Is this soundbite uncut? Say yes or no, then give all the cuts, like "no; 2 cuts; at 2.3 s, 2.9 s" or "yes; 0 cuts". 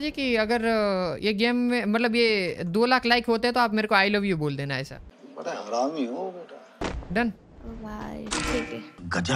yes; 0 cuts